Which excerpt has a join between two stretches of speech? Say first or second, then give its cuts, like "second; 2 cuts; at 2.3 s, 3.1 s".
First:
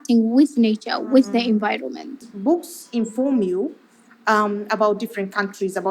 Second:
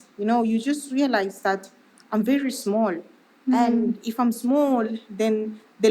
first; 1 cut; at 2.3 s